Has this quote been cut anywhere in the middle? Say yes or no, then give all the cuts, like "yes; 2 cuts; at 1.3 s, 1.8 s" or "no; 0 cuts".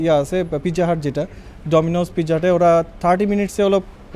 no; 0 cuts